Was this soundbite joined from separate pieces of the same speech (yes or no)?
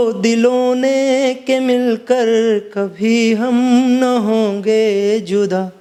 no